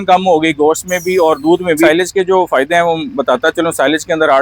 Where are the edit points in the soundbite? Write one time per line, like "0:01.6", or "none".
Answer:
0:01.9